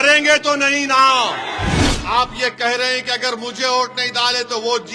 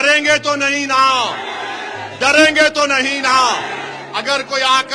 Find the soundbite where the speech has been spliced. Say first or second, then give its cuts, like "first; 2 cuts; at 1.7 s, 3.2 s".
first; 1 cut; at 1.9 s